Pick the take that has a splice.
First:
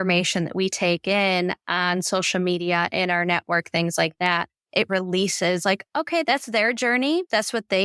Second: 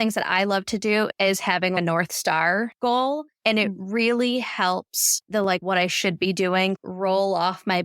second; 1 cut; at 2.7 s

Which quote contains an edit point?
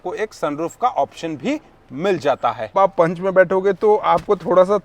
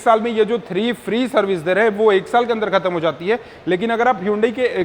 first; 1 cut; at 2.7 s

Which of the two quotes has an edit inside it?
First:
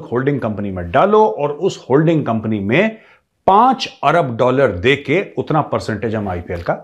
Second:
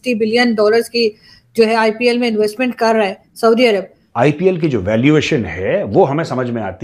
second; 1 cut; at 4.0 s

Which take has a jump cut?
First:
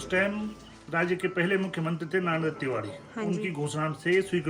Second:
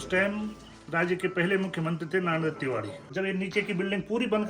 second; 1 cut; at 3.0 s

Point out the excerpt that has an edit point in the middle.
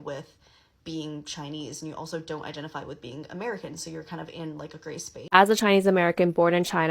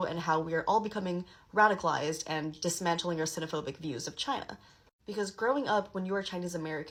first; 1 cut; at 5.1 s

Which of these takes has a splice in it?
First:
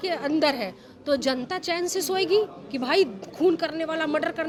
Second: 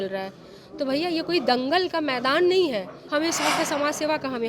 second; 1 cut; at 3.0 s

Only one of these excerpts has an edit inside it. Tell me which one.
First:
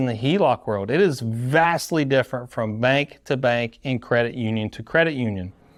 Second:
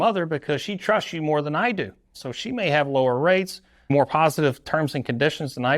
second; 2 cuts; at 2.2 s, 3.8 s

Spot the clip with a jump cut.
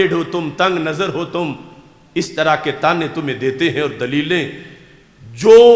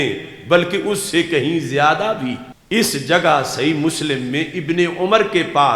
second; 1 cut; at 2.5 s

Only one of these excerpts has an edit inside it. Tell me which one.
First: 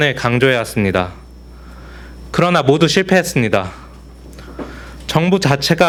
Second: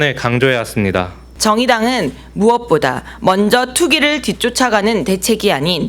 second; 1 cut; at 1.2 s

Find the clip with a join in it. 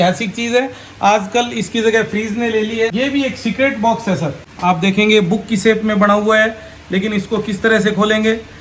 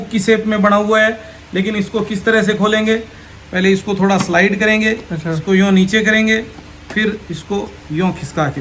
first; 2 cuts; at 2.9 s, 4.4 s

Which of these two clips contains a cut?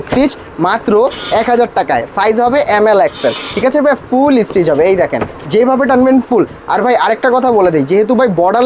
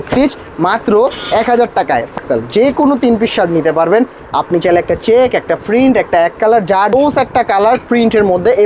second; 2 cuts; at 2.2 s, 6.9 s

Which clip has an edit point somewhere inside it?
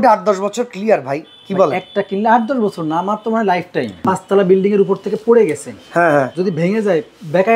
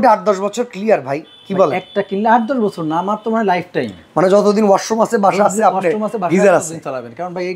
first; 1 cut; at 4.0 s

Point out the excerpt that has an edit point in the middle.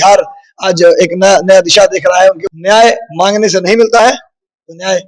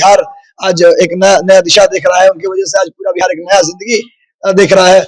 first; 1 cut; at 2.5 s

